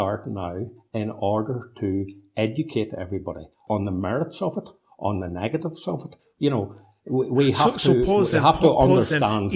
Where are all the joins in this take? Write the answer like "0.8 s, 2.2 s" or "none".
3.6 s